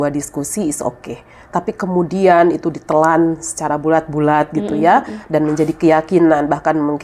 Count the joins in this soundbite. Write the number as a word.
zero